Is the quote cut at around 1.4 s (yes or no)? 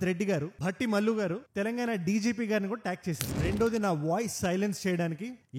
no